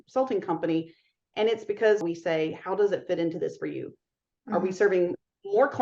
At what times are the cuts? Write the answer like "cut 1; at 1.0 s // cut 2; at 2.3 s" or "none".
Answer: cut 1; at 2.0 s